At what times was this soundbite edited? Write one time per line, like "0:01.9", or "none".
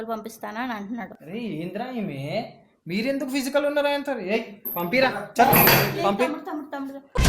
0:01.2